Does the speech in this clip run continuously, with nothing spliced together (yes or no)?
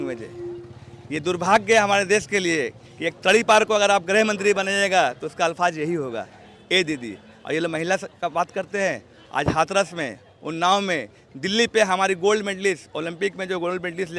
yes